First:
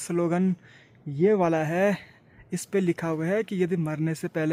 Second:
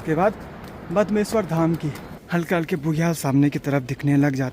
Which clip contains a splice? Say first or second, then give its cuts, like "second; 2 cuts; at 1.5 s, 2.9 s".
second; 1 cut; at 2.1 s